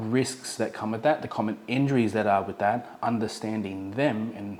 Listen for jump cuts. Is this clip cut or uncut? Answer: uncut